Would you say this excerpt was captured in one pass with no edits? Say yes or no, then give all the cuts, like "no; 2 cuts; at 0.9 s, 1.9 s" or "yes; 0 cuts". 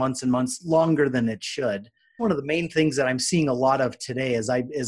no; 1 cut; at 2.2 s